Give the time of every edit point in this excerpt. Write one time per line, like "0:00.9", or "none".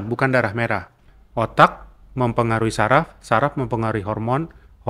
0:01.1